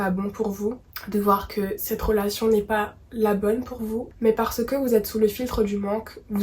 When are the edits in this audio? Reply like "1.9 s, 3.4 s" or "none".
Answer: 0.9 s, 4.1 s